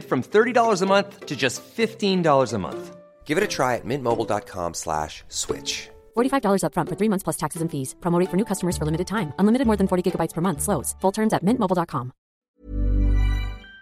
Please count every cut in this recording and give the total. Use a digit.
1